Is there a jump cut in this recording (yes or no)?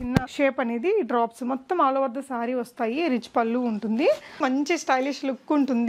yes